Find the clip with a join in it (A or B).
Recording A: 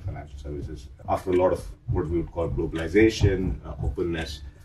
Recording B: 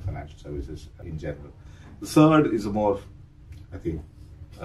A